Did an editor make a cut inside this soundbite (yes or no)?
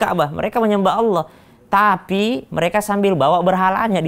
no